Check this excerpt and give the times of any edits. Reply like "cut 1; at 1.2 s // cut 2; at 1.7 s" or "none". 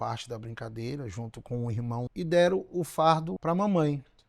cut 1; at 2.1 s // cut 2; at 3.3 s

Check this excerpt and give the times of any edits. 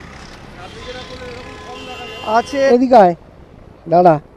cut 1; at 2.5 s

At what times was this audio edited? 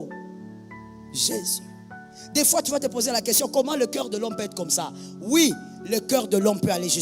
cut 1; at 2.2 s

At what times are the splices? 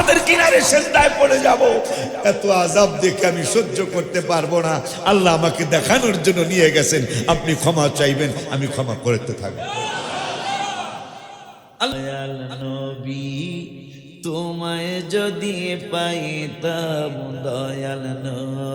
cut 1; at 11.9 s

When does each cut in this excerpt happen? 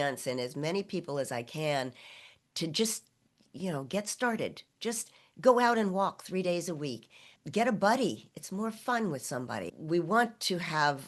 cut 1; at 7.3 s // cut 2; at 9.7 s

